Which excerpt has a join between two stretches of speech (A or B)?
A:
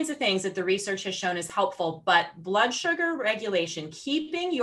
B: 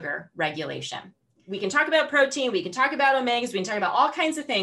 A